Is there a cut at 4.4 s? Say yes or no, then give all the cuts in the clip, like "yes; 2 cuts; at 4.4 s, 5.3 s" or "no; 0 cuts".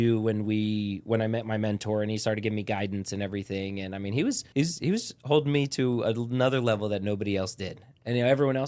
yes; 1 cut; at 4.4 s